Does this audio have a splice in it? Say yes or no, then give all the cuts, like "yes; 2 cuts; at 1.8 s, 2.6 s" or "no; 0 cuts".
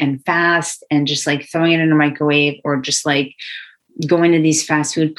no; 0 cuts